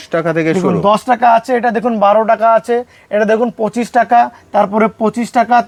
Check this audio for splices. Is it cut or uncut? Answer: uncut